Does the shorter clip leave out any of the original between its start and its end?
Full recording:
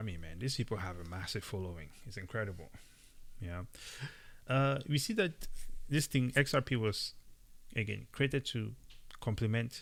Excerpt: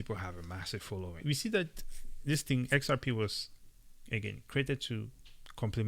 yes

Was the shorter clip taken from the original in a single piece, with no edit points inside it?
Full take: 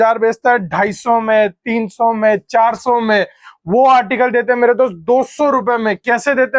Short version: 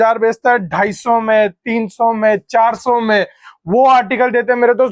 yes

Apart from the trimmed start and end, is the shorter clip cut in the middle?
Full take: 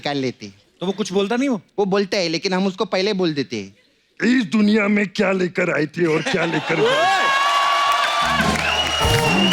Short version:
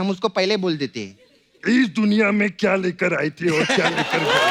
no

